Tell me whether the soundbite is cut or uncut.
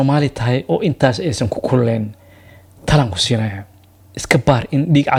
uncut